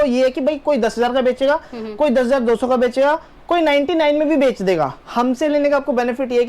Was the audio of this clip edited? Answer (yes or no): yes